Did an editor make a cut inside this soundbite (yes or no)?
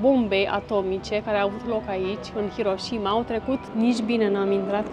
yes